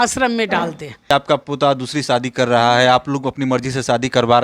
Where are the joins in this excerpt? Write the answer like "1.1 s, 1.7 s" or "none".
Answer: 1.1 s